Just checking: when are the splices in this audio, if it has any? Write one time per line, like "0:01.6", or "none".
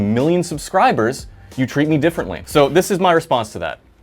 0:02.3